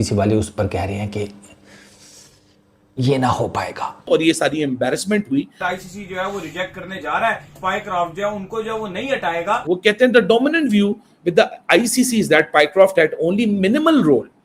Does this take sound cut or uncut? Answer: cut